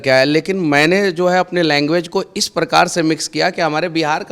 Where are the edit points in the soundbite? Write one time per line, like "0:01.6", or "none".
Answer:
none